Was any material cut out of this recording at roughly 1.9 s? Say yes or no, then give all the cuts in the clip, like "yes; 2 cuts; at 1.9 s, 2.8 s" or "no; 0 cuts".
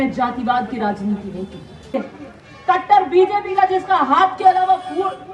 yes; 1 cut; at 1.9 s